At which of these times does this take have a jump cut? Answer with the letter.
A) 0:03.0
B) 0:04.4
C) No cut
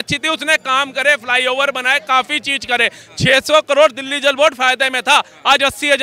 C